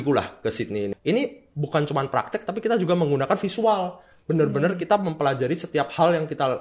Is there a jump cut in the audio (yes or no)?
yes